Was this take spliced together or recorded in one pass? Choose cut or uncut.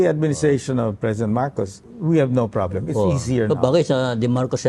cut